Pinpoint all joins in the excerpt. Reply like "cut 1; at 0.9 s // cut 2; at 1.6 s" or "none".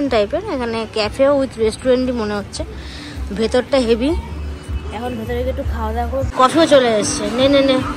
cut 1; at 6.3 s